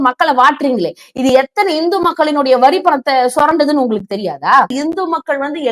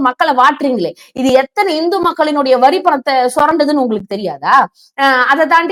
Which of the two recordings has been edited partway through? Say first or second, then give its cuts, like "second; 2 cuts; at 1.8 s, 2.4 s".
first; 1 cut; at 4.7 s